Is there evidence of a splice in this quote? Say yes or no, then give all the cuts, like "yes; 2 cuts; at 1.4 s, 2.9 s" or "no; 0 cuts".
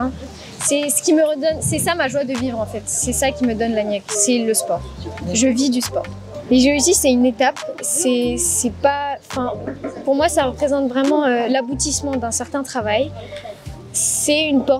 yes; 2 cuts; at 6.2 s, 13.7 s